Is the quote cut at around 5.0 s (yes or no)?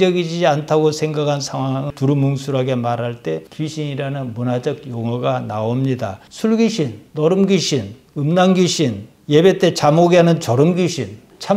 no